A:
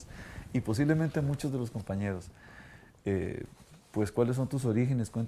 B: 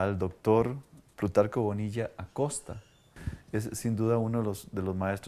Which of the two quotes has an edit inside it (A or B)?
A